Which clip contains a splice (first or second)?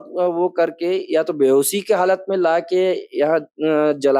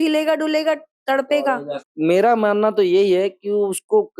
second